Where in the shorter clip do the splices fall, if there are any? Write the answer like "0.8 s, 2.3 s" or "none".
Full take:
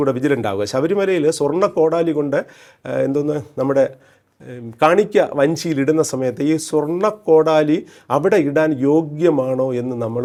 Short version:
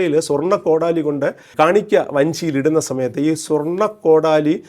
1.4 s